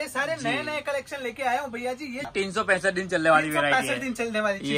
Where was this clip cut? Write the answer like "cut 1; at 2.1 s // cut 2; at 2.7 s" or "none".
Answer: cut 1; at 2.3 s